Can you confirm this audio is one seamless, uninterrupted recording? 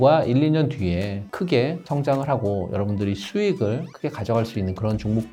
yes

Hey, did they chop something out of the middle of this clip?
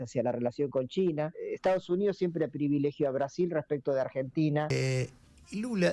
yes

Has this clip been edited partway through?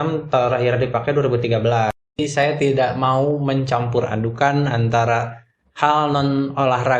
yes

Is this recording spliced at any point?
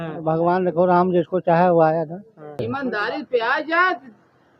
yes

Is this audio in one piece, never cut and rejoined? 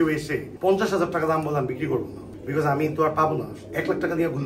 yes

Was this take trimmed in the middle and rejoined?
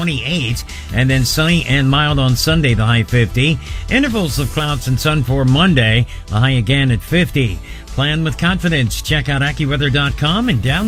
no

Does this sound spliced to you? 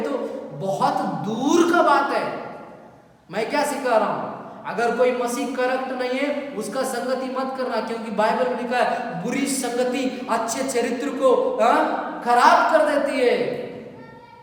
no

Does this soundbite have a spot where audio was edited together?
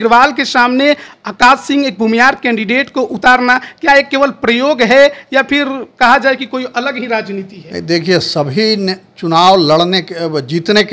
no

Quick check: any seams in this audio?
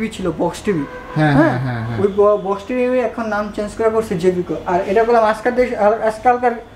no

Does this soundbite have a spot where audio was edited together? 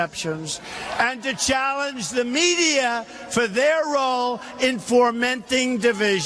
yes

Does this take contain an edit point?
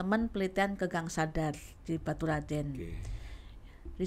no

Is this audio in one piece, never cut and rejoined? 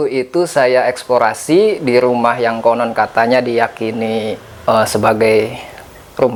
yes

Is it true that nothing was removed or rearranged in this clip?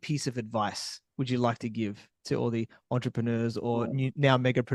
yes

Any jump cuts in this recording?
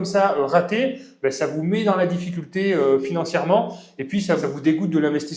yes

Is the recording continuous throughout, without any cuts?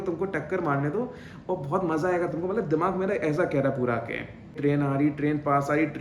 yes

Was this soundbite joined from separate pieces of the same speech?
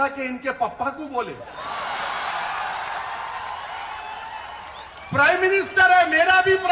no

